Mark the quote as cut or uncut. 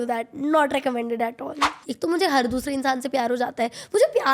cut